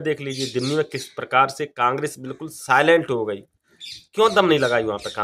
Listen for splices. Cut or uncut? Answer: uncut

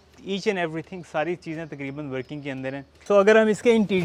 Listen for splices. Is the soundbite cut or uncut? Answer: uncut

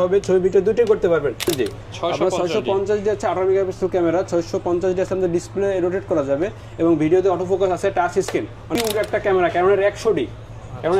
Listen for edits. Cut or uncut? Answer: cut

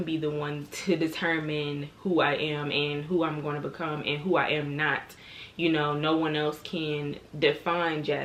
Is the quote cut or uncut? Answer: uncut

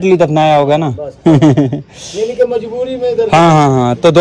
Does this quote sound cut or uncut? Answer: uncut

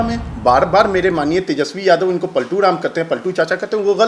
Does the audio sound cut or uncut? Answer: uncut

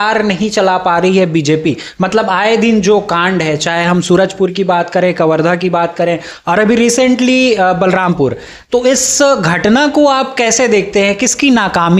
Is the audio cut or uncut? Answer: uncut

